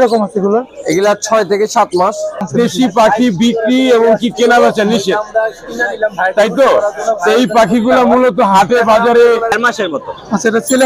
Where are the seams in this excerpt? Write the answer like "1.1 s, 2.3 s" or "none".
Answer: 2.5 s, 9.6 s